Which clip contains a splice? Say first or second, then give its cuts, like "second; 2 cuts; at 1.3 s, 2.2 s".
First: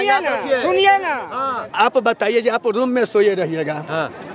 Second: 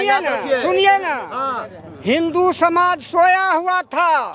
first; 1 cut; at 1.7 s